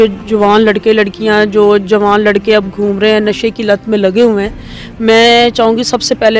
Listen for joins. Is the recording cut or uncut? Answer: uncut